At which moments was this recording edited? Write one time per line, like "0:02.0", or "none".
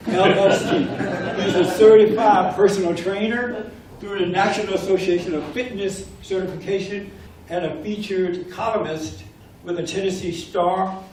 none